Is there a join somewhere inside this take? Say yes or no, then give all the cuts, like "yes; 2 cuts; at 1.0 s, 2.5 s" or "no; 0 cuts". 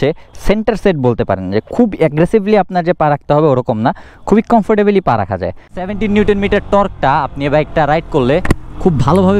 yes; 1 cut; at 5.7 s